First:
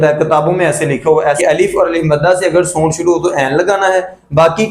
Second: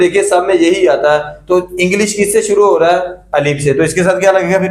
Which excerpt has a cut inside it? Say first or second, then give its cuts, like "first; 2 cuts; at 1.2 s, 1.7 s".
first; 1 cut; at 1.4 s